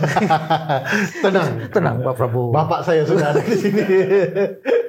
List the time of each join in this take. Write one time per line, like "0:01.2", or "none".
none